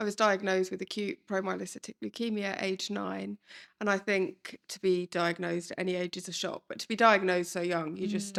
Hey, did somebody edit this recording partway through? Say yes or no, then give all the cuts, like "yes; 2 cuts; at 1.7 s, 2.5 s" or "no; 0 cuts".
no; 0 cuts